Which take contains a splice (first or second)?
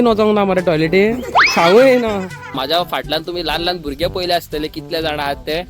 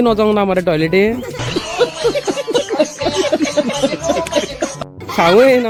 first